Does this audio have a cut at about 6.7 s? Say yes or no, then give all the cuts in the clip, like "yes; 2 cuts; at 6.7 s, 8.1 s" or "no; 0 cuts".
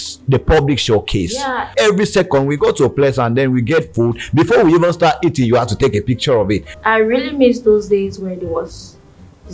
yes; 2 cuts; at 1.7 s, 6.7 s